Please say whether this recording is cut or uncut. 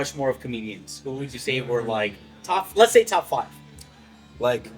uncut